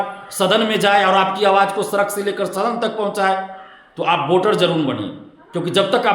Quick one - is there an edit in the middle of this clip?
no; 0 cuts

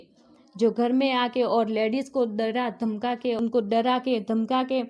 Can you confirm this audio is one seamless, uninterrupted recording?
no; 1 cut; at 3.4 s

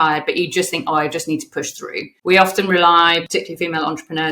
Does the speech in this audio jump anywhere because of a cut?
yes; 2 cuts; at 2.1 s, 3.3 s

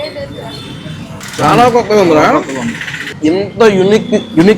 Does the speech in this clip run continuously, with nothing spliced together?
no; 2 cuts; at 1.2 s, 3.1 s

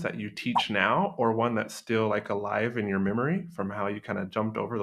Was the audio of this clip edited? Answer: no; 0 cuts

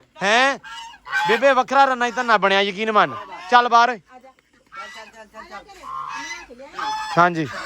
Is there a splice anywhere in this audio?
no; 0 cuts

